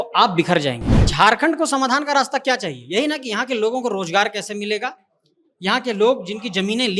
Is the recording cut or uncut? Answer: cut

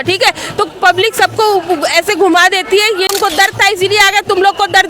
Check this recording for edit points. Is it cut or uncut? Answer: cut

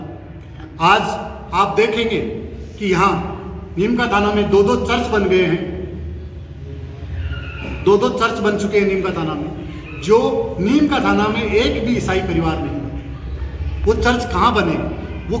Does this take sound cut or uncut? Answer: uncut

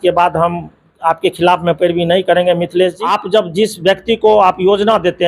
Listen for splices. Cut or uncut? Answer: cut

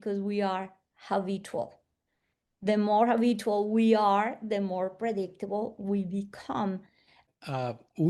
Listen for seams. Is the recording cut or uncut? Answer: cut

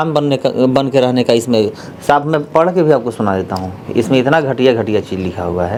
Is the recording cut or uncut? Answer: uncut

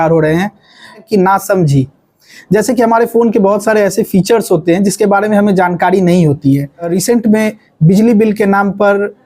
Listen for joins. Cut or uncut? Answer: cut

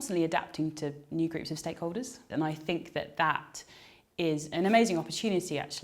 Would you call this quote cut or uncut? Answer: cut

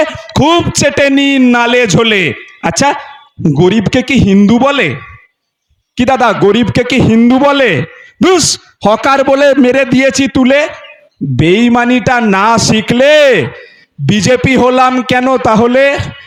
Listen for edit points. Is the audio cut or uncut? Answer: uncut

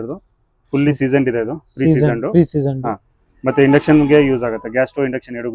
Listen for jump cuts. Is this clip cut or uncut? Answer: uncut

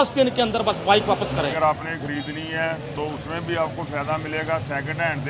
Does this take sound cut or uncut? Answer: cut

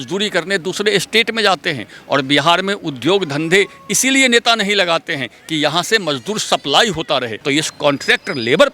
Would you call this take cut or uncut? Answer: cut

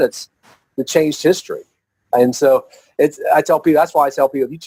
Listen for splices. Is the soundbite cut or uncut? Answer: uncut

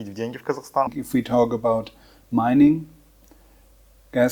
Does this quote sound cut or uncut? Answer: uncut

